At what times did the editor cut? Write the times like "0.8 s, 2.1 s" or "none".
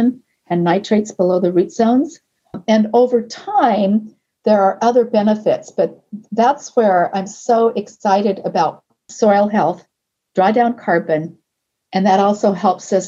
2.6 s, 9.1 s